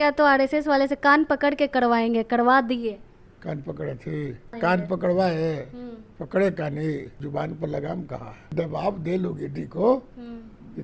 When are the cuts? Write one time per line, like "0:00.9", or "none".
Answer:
0:04.5
0:07.2
0:08.5